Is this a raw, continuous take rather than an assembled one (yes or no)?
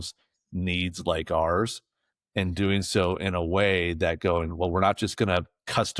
yes